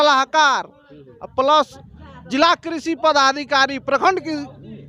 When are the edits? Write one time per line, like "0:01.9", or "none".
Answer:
none